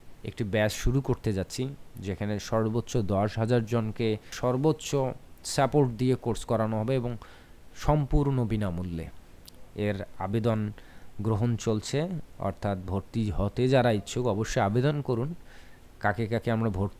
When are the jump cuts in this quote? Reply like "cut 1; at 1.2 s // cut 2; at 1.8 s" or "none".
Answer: cut 1; at 4.3 s